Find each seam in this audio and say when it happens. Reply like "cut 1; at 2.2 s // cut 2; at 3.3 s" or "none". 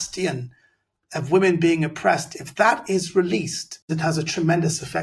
cut 1; at 3.9 s

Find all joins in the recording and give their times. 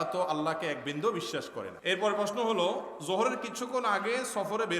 cut 1; at 1.7 s

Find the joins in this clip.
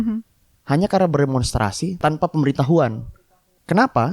cut 1; at 2.0 s // cut 2; at 2.9 s

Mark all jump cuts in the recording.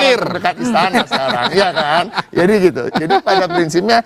none

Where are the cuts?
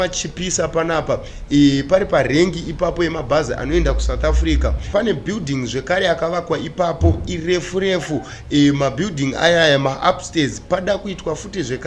none

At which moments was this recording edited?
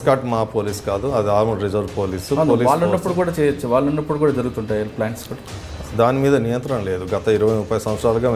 none

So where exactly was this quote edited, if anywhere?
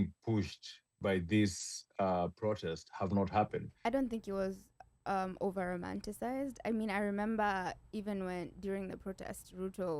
cut 1; at 3.7 s

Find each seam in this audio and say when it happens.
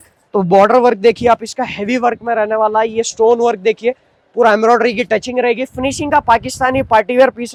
none

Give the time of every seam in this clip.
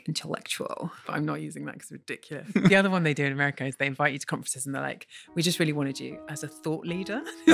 cut 1; at 1.0 s // cut 2; at 2.6 s

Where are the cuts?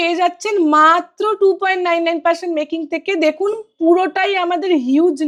none

